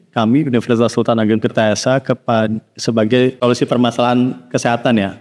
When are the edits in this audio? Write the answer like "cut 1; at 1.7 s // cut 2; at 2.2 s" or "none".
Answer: cut 1; at 3.4 s